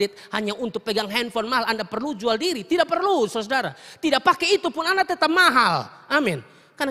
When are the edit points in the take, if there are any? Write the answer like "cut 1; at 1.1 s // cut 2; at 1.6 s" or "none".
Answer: none